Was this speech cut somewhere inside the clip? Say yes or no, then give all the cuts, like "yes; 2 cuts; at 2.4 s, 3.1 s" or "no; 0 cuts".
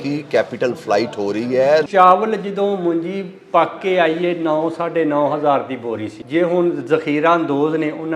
yes; 2 cuts; at 1.9 s, 6.1 s